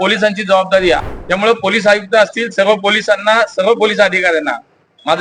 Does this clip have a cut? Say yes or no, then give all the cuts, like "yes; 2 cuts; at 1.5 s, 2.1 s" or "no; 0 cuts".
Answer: yes; 1 cut; at 1.0 s